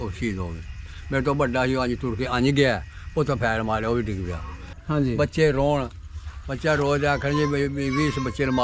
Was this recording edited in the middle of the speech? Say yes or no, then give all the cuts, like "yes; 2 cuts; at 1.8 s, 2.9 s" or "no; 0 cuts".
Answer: yes; 1 cut; at 4.7 s